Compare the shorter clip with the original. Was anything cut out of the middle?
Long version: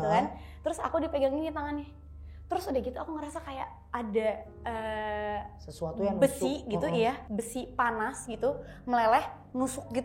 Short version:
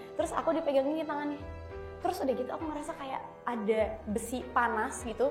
yes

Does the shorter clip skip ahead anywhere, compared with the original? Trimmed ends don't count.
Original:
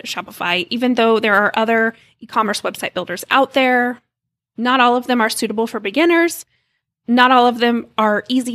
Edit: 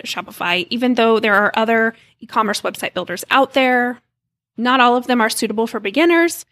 no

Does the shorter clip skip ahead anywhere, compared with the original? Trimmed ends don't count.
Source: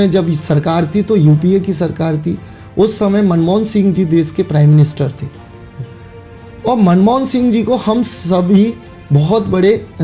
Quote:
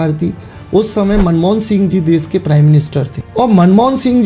yes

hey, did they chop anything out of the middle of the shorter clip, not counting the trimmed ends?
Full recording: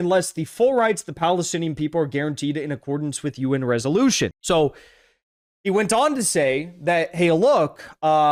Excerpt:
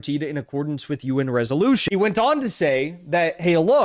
yes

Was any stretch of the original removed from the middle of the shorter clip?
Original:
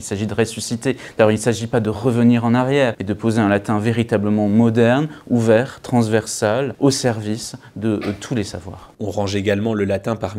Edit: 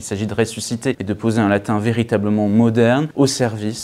yes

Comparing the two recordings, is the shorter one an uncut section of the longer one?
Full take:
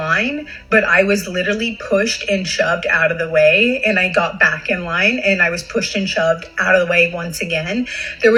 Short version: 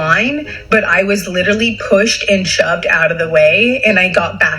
yes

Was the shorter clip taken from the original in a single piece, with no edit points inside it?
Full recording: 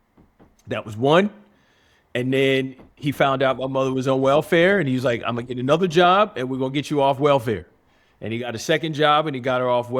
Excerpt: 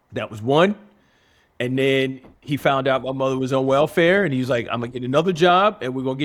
yes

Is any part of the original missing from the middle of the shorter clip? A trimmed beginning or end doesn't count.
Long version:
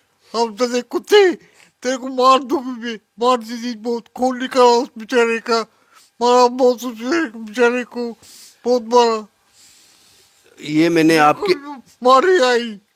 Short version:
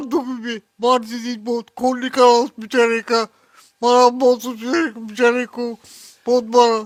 no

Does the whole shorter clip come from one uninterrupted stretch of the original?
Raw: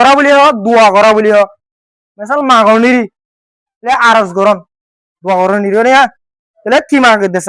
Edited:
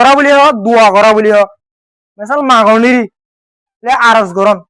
yes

